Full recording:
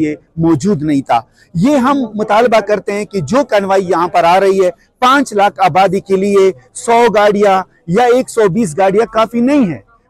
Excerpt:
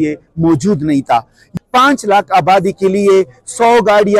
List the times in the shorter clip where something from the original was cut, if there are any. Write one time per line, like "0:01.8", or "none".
0:01.5